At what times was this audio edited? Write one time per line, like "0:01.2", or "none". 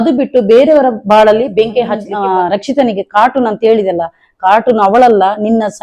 0:02.1

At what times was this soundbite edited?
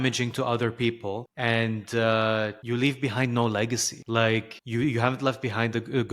0:01.3
0:02.6
0:03.9
0:04.6

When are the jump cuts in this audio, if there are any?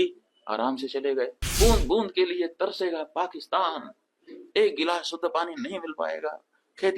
0:01.4

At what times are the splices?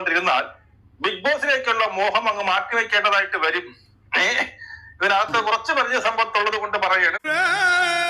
0:07.2

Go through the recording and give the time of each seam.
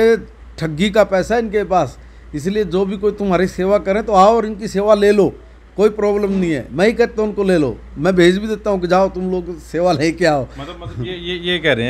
none

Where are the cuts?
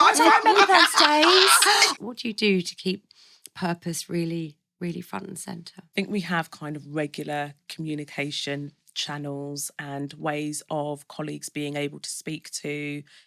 0:01.9

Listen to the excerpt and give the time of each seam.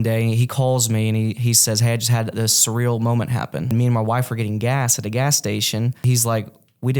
0:03.7
0:06.0

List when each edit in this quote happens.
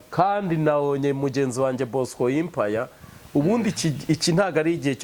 none

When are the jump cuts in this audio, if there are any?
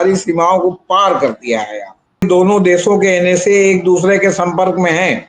0:02.2

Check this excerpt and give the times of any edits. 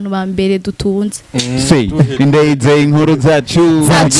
0:01.3

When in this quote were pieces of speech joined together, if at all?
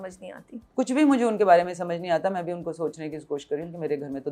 none

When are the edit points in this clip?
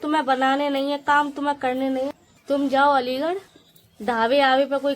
0:02.2

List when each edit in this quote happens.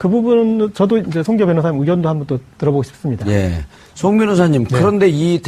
0:03.0

